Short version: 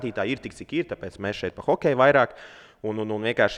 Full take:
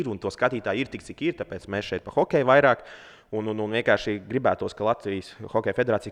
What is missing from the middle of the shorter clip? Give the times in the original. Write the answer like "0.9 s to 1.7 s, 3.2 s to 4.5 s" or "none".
none

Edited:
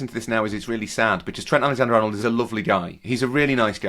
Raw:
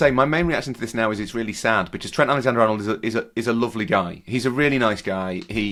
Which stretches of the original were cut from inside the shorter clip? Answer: 2.8 s to 3.4 s

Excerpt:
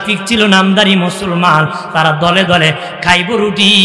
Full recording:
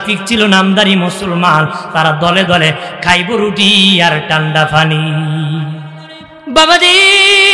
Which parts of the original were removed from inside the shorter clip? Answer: none

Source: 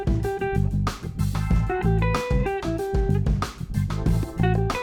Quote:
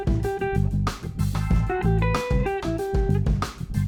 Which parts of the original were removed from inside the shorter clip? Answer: none

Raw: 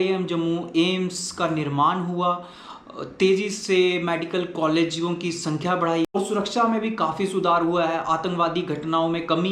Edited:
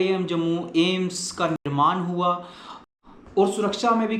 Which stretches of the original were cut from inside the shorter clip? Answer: 3.2 s to 5.9 s

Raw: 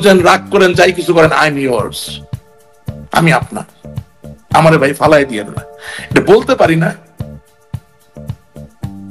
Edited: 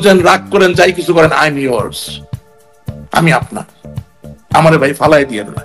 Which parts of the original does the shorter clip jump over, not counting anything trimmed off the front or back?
none

